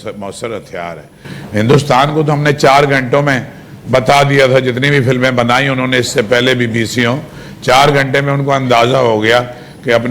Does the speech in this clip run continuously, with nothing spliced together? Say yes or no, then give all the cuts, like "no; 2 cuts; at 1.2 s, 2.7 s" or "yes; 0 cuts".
no; 1 cut; at 1.3 s